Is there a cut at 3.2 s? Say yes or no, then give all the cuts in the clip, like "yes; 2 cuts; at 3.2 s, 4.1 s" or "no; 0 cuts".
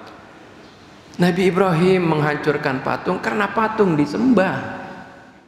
no; 0 cuts